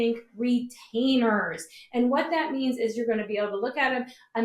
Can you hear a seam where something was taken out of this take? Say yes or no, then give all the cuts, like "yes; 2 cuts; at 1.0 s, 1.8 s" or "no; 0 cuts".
no; 0 cuts